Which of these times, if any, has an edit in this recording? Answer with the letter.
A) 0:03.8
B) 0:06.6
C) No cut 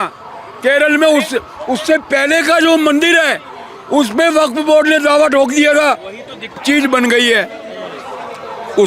B